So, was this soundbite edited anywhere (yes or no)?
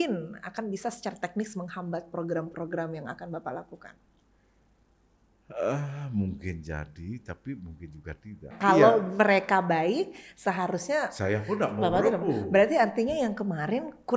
yes